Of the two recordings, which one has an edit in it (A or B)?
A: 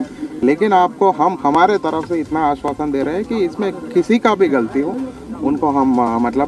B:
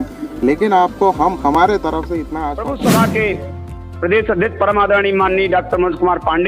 B